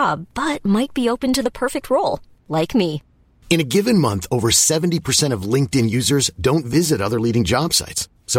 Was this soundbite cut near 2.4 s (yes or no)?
no